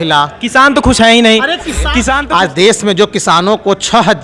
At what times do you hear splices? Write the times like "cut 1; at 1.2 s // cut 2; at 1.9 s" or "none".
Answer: cut 1; at 2.2 s